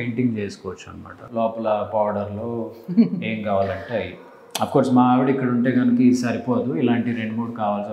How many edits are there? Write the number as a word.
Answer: one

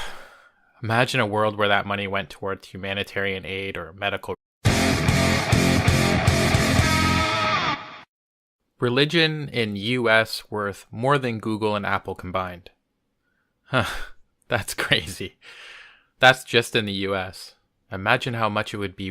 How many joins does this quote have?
zero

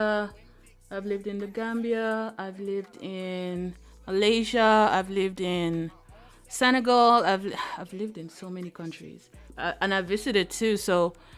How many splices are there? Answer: one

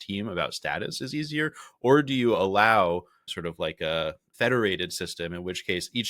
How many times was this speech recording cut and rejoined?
two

